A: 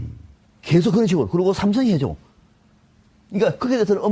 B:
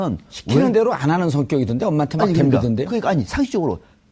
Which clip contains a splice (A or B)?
A